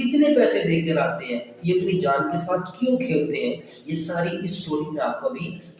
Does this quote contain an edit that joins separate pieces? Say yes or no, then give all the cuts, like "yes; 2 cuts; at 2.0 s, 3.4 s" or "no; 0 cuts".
no; 0 cuts